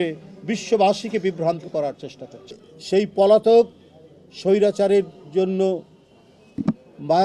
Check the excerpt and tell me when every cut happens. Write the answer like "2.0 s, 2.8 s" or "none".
2.7 s